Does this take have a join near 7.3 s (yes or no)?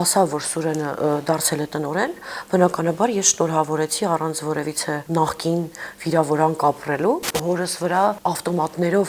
yes